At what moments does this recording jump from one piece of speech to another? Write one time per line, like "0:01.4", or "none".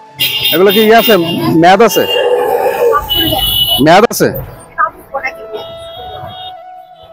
none